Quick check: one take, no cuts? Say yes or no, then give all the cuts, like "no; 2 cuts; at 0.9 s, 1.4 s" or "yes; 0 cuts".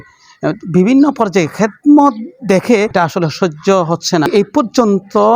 no; 2 cuts; at 2.9 s, 4.3 s